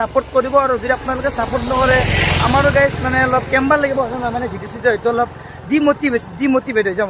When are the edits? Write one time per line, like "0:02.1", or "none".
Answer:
none